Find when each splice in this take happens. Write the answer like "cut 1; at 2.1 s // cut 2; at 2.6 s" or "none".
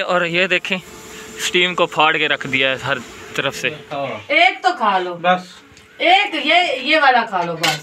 cut 1; at 3.9 s